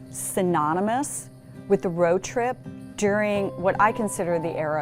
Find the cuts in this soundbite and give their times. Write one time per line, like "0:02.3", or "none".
none